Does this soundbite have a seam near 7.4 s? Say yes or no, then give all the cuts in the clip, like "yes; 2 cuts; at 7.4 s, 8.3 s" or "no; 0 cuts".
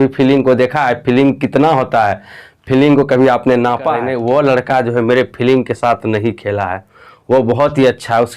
no; 1 cut; at 4.1 s